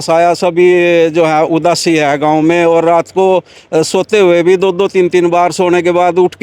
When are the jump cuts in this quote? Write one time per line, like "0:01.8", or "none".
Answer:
none